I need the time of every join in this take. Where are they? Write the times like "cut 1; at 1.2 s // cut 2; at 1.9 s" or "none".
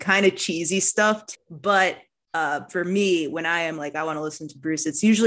cut 1; at 1.3 s